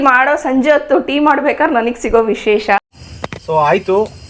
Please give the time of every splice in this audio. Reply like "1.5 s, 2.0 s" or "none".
3.0 s